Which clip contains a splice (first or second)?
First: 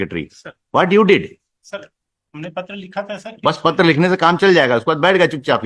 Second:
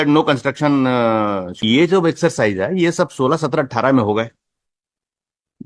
second